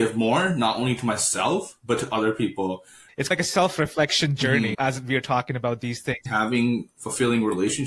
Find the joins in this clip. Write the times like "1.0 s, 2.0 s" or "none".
3.1 s, 6.3 s